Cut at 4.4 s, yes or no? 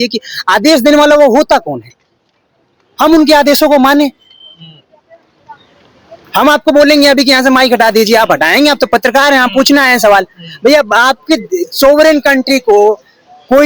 no